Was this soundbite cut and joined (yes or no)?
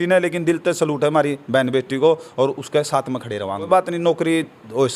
yes